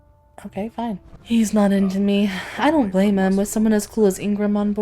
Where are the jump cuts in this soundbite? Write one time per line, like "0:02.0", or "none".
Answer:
0:01.1